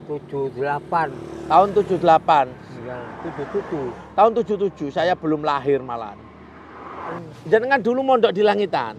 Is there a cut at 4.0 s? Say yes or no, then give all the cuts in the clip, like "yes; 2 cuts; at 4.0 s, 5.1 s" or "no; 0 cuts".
no; 1 cut; at 7.3 s